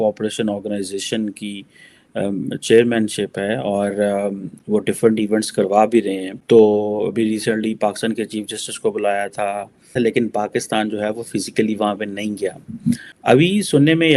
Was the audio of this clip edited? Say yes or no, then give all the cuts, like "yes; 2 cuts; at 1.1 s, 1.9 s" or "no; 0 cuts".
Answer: no; 0 cuts